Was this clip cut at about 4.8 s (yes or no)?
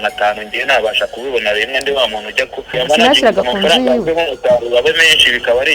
no